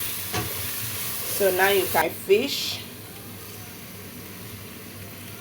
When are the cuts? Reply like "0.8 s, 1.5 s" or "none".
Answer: 2.0 s